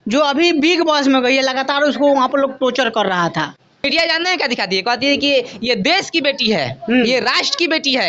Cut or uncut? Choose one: cut